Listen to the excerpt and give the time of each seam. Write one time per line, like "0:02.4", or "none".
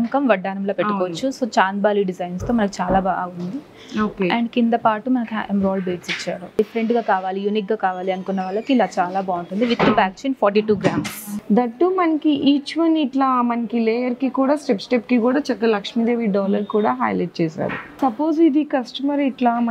0:06.6
0:11.3
0:17.8